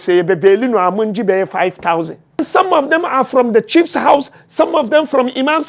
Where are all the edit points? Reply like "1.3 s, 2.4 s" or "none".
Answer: 2.4 s